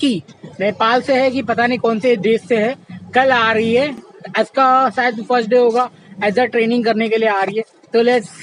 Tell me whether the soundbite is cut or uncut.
uncut